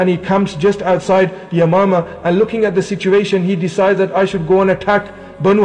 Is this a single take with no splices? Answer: yes; 0 cuts

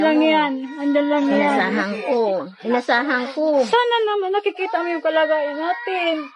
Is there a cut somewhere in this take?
no; 0 cuts

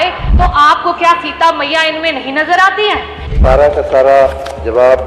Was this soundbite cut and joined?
yes; 1 cut; at 3.3 s

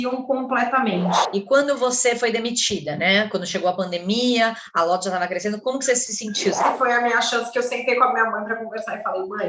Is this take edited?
yes; 2 cuts; at 1.3 s, 6.7 s

